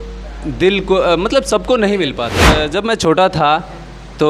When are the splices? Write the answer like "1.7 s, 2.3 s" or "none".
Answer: 2.3 s